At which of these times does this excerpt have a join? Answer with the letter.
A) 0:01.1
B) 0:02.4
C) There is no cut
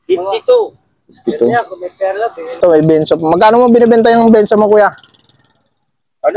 B